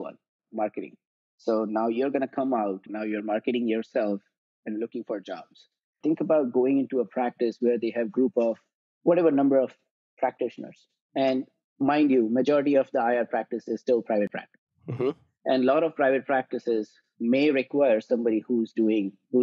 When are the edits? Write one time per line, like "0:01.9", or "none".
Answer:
0:02.9
0:06.0